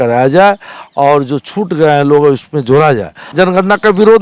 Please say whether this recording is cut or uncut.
cut